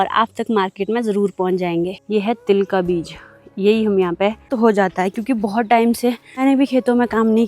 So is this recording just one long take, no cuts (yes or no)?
no